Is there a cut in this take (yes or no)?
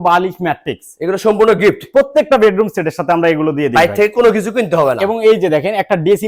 no